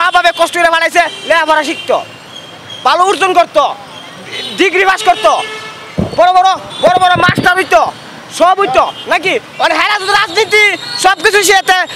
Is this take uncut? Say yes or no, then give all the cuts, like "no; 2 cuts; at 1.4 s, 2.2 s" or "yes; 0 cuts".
yes; 0 cuts